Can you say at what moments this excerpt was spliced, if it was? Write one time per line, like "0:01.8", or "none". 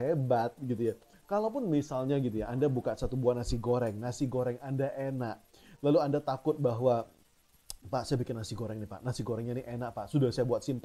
none